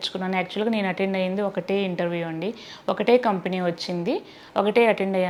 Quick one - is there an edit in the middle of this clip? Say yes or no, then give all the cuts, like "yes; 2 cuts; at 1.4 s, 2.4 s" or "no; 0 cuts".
no; 0 cuts